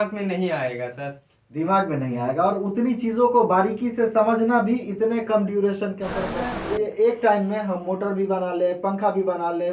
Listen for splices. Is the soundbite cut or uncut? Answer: cut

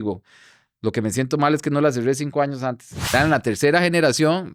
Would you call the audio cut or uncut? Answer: cut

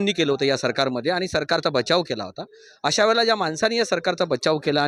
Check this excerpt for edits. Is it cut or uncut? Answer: uncut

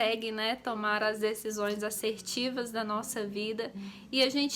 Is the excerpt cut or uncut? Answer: uncut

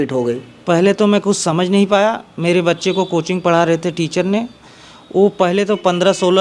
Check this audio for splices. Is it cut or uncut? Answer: uncut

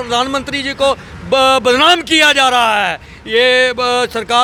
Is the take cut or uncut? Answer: uncut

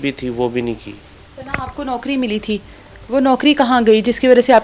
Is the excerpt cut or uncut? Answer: uncut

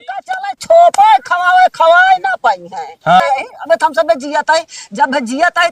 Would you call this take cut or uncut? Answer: cut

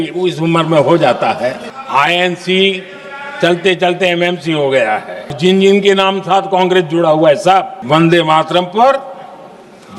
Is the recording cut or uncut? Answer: cut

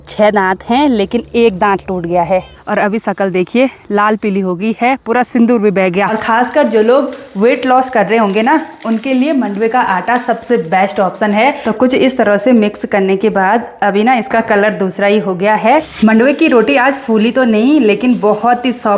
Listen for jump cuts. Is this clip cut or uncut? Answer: cut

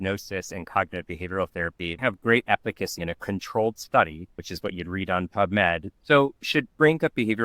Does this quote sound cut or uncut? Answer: cut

